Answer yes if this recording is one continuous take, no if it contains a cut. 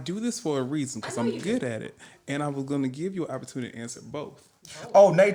yes